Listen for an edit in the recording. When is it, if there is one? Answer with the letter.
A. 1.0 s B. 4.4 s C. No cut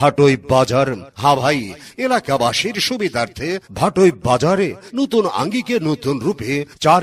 A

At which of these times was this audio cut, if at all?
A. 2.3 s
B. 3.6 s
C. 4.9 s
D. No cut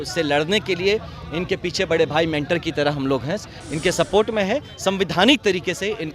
D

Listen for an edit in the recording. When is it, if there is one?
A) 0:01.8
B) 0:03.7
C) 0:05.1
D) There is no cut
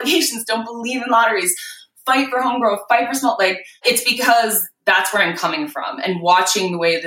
B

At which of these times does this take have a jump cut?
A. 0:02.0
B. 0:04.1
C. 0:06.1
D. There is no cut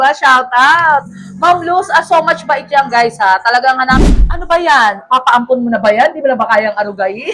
B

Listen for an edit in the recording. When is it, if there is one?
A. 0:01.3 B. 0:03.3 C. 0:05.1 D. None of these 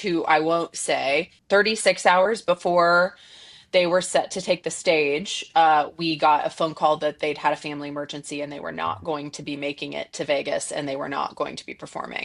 A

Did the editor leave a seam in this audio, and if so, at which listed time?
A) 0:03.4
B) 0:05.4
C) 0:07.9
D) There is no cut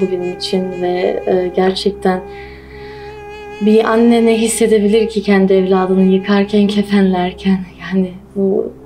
D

